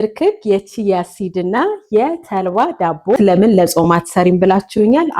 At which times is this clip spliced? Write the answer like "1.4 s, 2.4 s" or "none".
3.2 s